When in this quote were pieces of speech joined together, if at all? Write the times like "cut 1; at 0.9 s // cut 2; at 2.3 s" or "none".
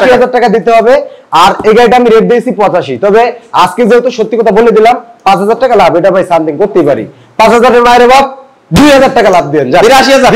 none